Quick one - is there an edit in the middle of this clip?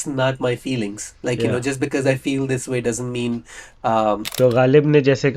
yes; 1 cut; at 4.2 s

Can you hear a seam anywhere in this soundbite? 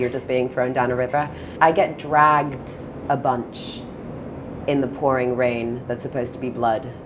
yes; 1 cut; at 1.5 s

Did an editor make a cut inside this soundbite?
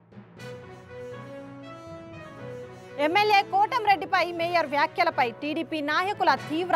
yes; 1 cut; at 2.4 s

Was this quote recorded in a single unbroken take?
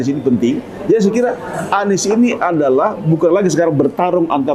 yes; 0 cuts

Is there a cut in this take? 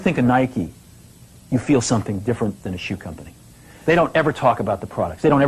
yes; 1 cut; at 3.8 s

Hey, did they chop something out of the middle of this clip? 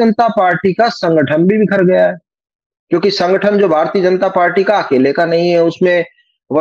no; 0 cuts

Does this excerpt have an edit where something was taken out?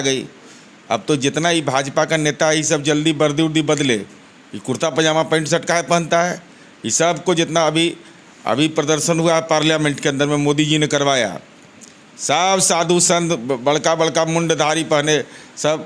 no; 0 cuts

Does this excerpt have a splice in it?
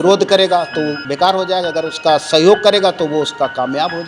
yes; 1 cut; at 1.0 s

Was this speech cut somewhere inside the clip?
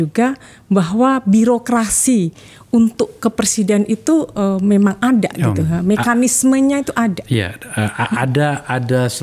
no; 0 cuts

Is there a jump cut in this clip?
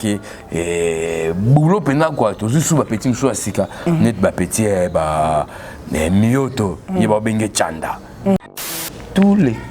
yes; 1 cut; at 8.5 s

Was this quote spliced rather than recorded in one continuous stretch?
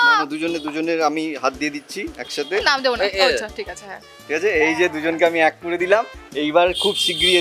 no; 0 cuts

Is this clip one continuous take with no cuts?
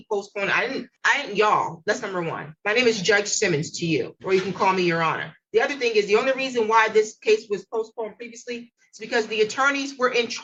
yes; 0 cuts

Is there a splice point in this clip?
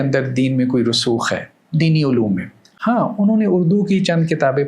no; 0 cuts

